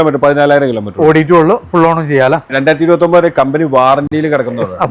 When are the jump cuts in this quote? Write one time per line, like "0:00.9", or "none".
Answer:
none